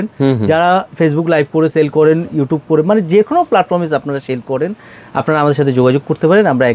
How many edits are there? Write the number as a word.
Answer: zero